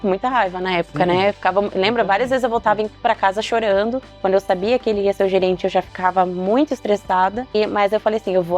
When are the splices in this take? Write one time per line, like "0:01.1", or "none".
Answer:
0:04.1